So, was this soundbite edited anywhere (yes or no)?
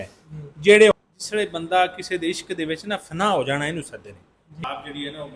yes